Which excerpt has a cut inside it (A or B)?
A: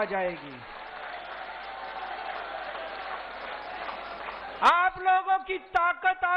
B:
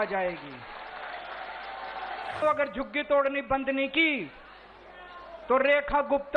B